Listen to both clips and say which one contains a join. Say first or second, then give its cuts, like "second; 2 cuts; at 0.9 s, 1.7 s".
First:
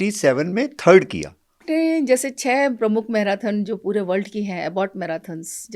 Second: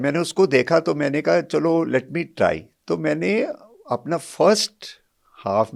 first; 1 cut; at 1.6 s